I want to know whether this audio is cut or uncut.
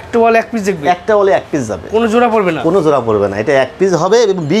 uncut